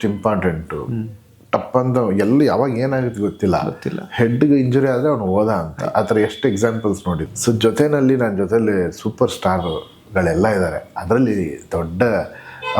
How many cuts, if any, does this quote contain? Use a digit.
1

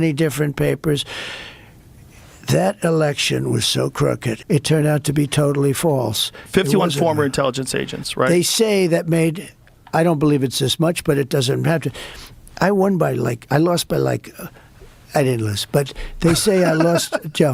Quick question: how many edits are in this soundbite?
1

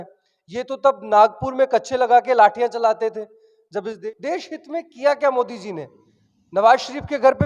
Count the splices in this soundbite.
1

